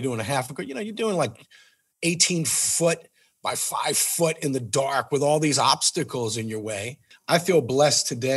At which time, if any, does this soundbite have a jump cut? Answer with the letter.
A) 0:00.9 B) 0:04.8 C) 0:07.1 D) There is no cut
C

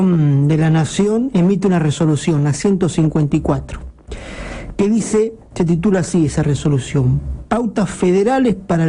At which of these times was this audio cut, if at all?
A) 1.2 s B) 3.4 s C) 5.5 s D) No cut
A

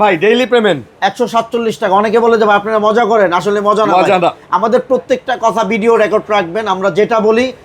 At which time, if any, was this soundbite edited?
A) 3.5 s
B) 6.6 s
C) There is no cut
C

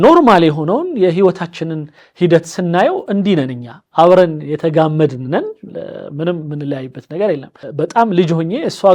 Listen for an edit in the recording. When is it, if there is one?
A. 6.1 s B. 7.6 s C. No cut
B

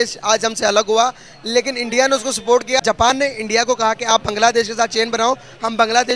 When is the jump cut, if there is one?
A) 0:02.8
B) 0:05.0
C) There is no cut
A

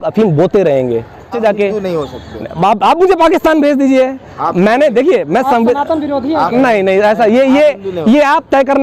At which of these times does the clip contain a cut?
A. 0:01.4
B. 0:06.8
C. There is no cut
A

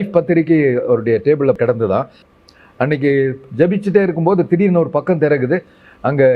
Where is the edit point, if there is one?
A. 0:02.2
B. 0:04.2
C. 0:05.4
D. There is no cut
A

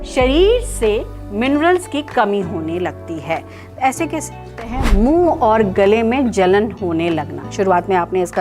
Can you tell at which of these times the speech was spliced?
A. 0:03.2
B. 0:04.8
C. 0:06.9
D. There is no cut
B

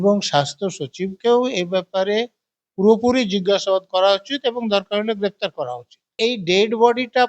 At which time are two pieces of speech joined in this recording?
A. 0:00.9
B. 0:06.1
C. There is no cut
B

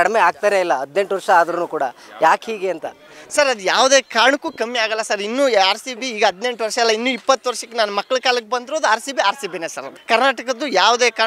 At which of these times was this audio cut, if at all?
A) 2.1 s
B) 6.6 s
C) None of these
C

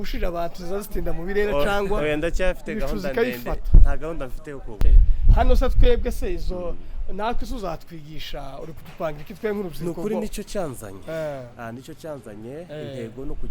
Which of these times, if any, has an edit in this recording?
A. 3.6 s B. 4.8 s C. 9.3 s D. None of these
B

